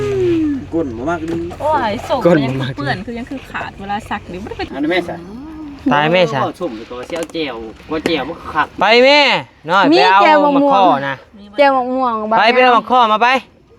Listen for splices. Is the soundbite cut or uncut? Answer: cut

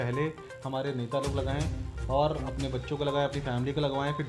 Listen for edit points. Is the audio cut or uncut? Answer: uncut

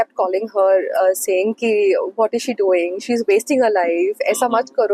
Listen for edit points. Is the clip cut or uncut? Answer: uncut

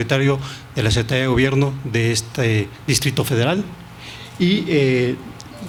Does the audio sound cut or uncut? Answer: uncut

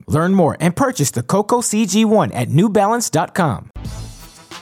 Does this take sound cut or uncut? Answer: cut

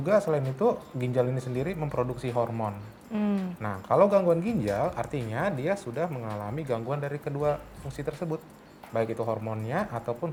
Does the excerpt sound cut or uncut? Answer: uncut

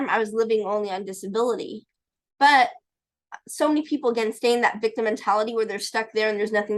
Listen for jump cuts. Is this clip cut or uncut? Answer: uncut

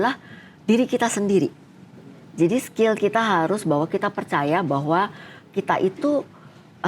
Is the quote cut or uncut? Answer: uncut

